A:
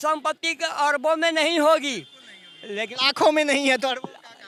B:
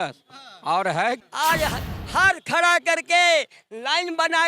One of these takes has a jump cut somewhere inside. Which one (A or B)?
B